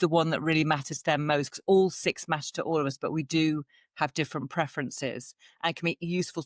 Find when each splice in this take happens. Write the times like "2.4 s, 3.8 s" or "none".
none